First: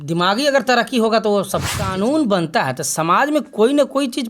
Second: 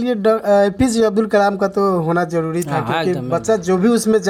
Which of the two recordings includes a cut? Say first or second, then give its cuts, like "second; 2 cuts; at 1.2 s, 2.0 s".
first; 1 cut; at 1.8 s